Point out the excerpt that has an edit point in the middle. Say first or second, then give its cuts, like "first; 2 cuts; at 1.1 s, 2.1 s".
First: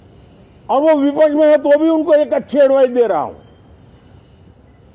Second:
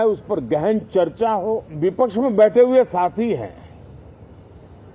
second; 1 cut; at 1.7 s